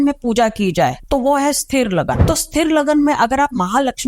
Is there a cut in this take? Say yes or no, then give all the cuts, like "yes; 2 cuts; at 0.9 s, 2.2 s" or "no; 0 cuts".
yes; 2 cuts; at 1.0 s, 2.2 s